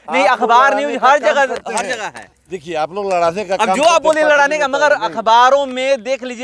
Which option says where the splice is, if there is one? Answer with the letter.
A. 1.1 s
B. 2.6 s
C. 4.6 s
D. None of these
D